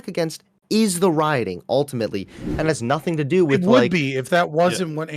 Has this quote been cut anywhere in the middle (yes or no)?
yes